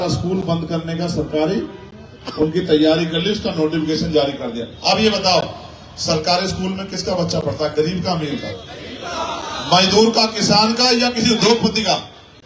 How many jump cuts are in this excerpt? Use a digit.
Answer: 0